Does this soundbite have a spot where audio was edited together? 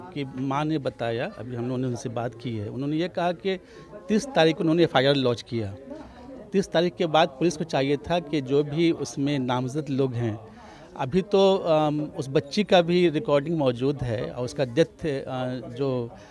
no; 0 cuts

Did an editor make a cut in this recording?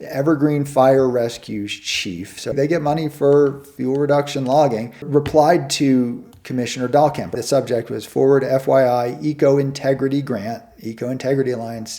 yes; 3 cuts; at 2.5 s, 5.1 s, 7.4 s

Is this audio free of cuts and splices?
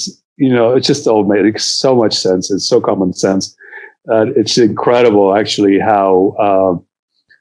yes; 0 cuts

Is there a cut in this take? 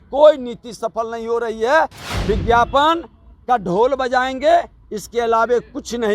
yes; 1 cut; at 2.1 s

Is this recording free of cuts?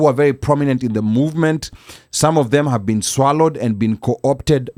yes; 0 cuts

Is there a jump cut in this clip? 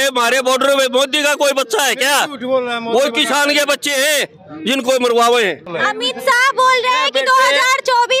no; 0 cuts

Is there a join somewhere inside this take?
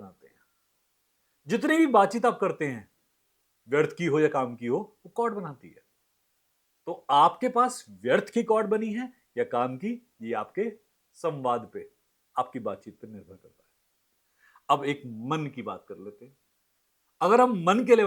no; 0 cuts

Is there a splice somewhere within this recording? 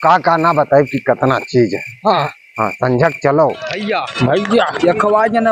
yes; 1 cut; at 3.7 s

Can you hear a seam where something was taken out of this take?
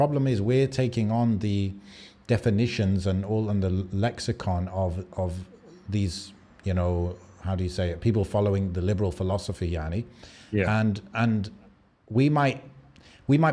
no; 0 cuts

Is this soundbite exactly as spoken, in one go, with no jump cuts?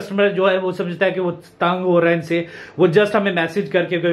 yes; 0 cuts

